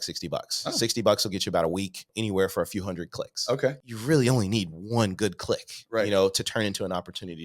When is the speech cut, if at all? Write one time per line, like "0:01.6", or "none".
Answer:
0:02.0
0:03.9